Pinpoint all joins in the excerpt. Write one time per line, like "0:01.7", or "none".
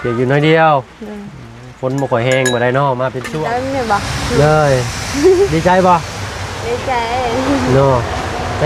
0:03.3